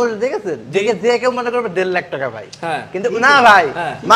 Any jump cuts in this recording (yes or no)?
no